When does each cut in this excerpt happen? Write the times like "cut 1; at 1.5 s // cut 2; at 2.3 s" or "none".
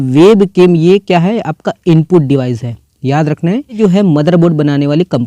cut 1; at 3.8 s